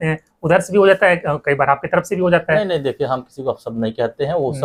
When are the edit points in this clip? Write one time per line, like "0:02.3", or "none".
none